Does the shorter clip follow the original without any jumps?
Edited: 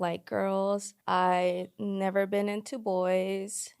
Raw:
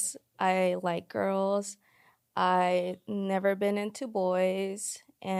no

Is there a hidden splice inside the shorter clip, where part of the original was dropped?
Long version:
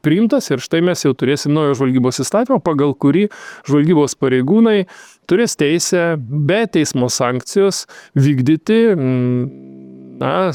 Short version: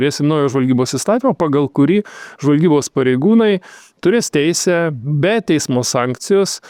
no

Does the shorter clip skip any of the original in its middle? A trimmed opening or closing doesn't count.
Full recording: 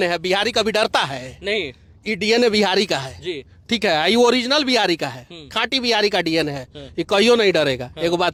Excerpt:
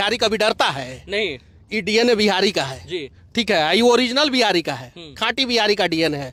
no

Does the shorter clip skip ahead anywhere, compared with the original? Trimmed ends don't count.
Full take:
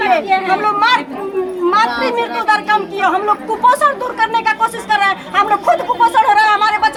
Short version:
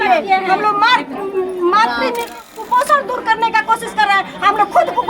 yes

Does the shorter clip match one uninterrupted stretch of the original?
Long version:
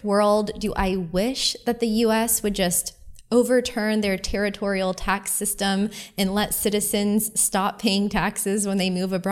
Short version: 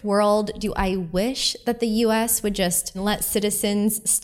no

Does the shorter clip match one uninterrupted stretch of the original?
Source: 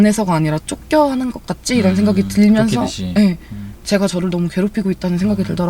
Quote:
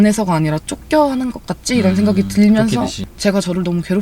no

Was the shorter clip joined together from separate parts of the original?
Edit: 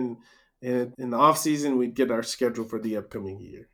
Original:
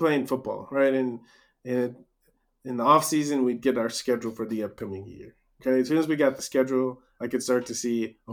yes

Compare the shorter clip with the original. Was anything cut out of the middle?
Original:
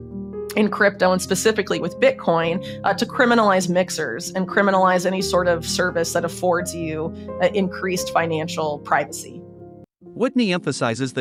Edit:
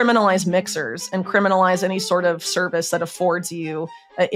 no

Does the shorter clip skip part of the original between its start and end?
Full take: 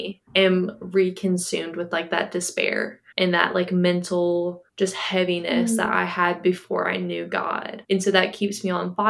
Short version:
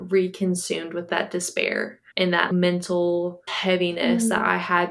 yes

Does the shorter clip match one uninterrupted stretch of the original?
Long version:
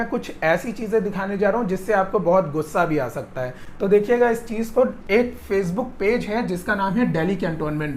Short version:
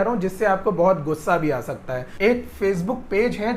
no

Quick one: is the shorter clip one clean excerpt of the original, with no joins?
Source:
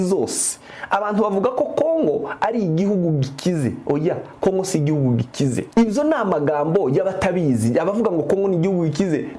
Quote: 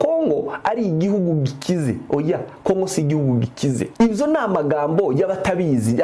yes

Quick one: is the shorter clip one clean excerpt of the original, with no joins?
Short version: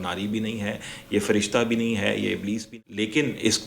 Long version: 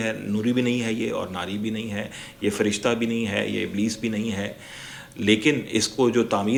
no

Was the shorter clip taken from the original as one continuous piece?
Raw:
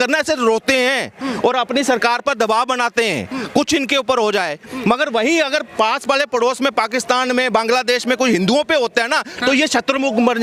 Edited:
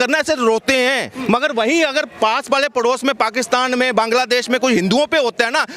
no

